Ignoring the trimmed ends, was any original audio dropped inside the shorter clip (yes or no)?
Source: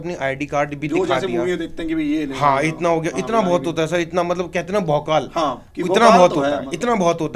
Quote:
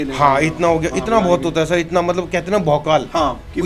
no